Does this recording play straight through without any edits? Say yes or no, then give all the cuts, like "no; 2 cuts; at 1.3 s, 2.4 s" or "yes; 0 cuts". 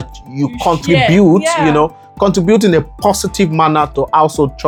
yes; 0 cuts